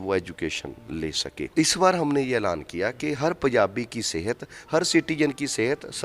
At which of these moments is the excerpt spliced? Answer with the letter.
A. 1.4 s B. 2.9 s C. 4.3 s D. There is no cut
A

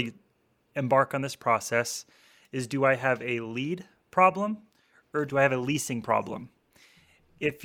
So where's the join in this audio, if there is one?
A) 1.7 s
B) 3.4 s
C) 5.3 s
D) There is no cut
C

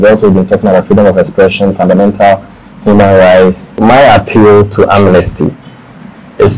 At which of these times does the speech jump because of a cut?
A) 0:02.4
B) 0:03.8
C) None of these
B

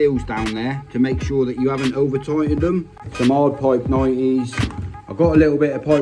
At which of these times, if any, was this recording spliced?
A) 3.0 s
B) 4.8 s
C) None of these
A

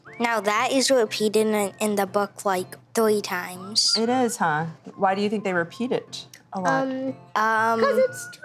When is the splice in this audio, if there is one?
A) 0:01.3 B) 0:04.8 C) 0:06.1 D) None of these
B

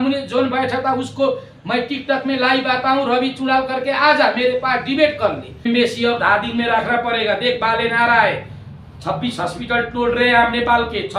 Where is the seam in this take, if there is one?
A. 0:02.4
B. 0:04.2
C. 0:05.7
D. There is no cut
C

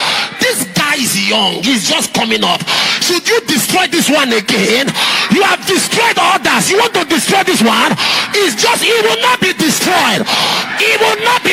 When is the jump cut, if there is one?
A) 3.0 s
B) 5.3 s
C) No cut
C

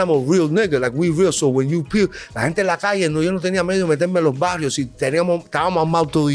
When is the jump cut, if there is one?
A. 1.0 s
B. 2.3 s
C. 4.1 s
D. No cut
D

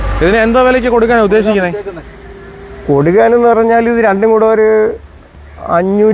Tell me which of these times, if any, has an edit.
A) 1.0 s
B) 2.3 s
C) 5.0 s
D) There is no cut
D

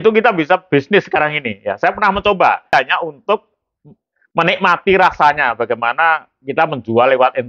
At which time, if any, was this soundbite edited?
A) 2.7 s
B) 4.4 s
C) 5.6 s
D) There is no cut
A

